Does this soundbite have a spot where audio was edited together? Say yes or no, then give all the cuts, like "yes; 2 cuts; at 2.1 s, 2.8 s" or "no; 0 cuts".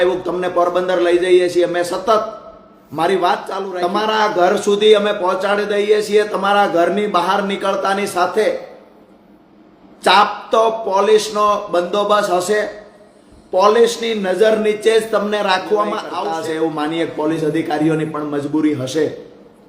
yes; 2 cuts; at 3.7 s, 16.1 s